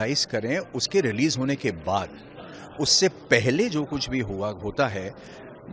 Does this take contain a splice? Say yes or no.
no